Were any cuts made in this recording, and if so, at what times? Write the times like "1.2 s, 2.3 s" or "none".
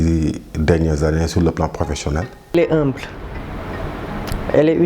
2.4 s